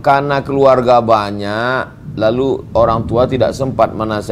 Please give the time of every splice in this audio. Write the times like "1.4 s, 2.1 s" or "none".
none